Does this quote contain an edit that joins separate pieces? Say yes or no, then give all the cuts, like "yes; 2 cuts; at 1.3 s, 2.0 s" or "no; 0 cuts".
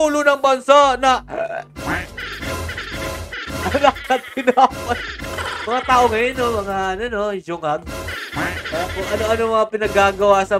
no; 0 cuts